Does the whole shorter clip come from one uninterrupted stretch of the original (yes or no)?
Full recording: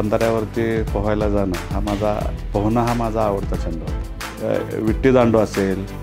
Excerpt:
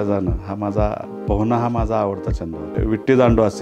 no